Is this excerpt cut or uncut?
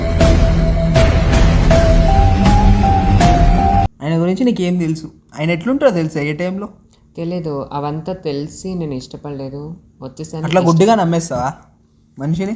cut